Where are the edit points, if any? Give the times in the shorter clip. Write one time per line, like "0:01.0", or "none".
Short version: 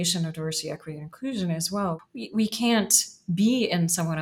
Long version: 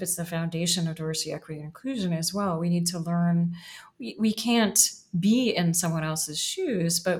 0:02.0